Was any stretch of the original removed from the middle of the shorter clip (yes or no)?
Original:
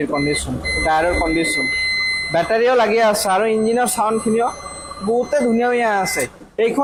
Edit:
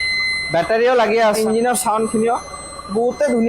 yes